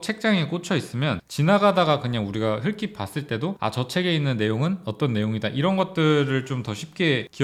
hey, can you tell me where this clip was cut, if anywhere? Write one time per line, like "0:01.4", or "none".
none